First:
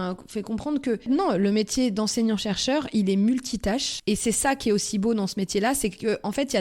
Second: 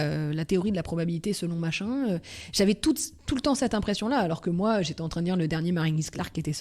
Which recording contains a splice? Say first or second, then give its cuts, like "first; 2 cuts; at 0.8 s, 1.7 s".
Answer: first; 2 cuts; at 1.1 s, 3.9 s